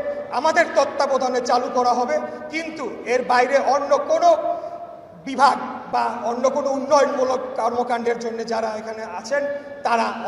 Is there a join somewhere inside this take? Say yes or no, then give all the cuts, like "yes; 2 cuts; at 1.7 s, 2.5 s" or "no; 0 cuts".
no; 0 cuts